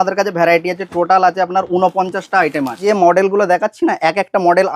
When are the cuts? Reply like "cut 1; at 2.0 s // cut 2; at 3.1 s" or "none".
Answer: cut 1; at 2.8 s